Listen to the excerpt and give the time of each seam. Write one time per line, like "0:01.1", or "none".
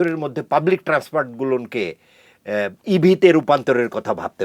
none

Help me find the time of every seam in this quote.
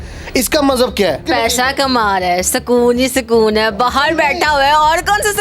0:01.2

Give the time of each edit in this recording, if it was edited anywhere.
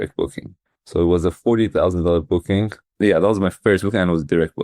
0:02.8

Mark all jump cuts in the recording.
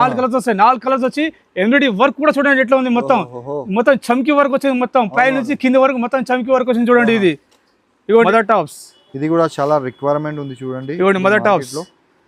0:08.2

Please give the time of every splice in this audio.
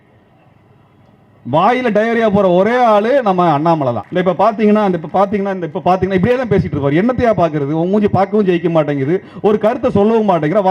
0:04.0

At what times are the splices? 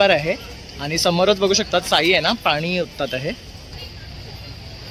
0:03.7

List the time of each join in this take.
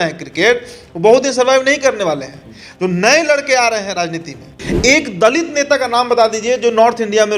0:04.6

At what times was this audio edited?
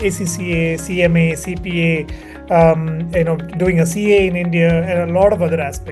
none

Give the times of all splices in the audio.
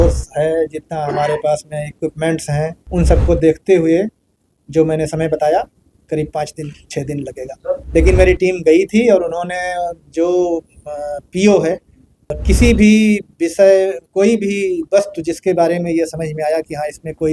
0:02.8
0:07.8
0:12.3

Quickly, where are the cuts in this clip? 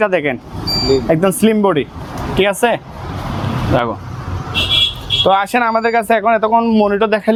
none

